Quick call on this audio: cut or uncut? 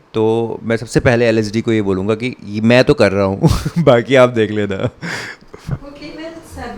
uncut